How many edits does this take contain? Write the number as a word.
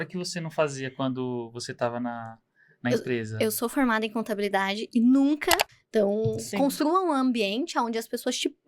one